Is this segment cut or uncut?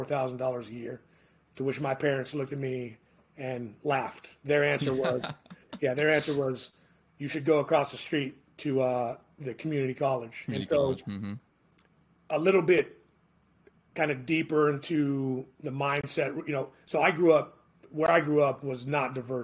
uncut